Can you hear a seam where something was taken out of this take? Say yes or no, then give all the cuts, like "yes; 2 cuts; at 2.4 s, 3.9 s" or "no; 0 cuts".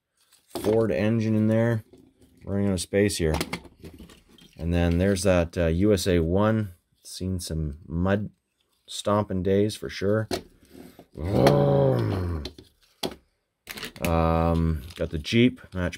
no; 0 cuts